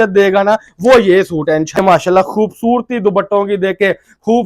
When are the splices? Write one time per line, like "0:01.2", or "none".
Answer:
0:01.8